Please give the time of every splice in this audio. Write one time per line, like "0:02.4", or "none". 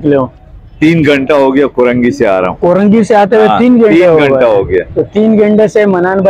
none